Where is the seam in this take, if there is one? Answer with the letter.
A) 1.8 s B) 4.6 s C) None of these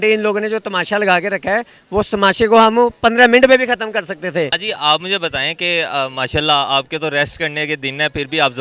B